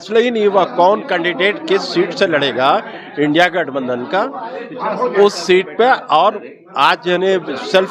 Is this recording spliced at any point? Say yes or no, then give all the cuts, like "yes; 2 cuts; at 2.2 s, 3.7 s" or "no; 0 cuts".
no; 0 cuts